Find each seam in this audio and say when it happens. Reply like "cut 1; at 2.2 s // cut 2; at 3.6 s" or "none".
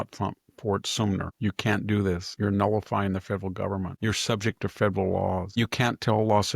cut 1; at 1.3 s // cut 2; at 2.3 s // cut 3; at 3.9 s // cut 4; at 5.5 s